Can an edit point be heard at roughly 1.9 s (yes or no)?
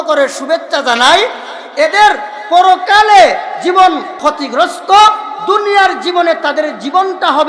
no